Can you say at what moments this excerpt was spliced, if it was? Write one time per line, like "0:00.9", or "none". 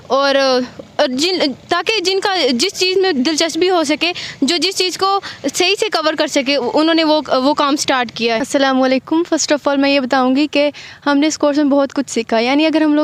0:08.4